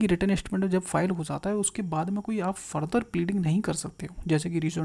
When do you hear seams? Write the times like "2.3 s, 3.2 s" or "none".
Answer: none